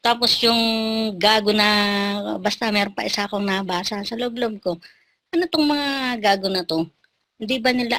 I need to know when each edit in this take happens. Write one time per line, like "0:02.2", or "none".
none

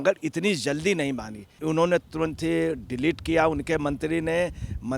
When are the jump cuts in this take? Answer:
0:01.6

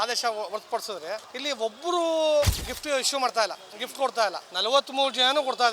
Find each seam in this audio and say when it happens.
0:01.3
0:02.7
0:04.5

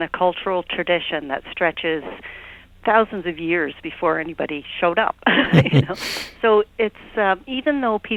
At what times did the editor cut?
none

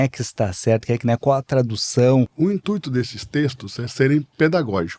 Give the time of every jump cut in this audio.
0:02.3

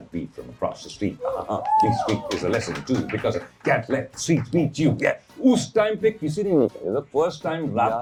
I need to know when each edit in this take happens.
none

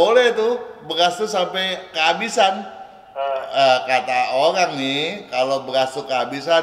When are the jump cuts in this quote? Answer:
none

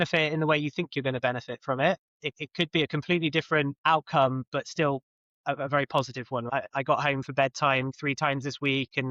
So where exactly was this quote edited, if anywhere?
0:02.1
0:03.7
0:06.4
0:07.9

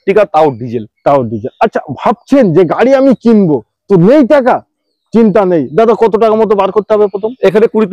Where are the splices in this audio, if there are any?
none

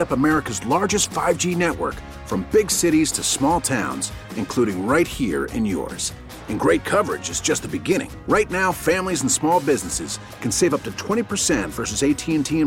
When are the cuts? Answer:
none

